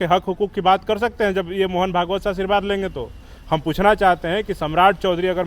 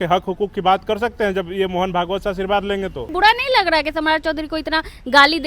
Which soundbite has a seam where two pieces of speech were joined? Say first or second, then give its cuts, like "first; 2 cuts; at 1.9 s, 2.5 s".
second; 1 cut; at 3.1 s